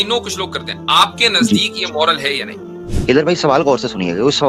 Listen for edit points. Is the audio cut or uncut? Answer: cut